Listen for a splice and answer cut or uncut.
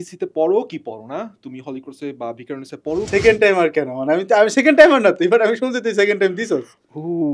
cut